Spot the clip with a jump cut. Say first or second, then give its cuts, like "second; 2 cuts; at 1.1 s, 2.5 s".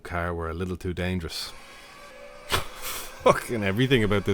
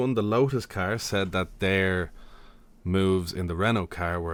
first; 1 cut; at 2.0 s